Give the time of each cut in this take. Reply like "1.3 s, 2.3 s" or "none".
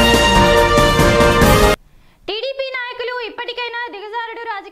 none